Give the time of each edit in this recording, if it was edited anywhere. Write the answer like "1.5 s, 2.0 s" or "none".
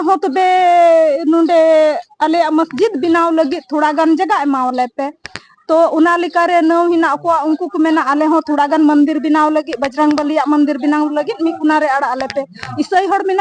none